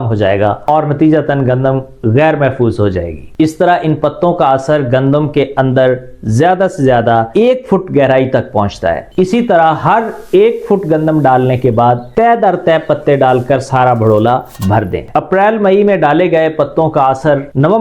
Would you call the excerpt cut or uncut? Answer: cut